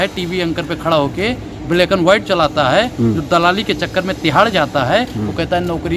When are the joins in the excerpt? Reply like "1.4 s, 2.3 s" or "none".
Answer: none